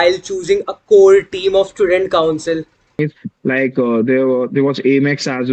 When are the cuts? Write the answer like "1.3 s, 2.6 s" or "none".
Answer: 3.0 s